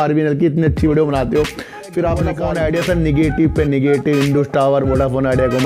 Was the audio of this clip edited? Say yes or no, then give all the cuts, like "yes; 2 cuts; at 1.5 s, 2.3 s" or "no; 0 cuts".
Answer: yes; 1 cut; at 2.4 s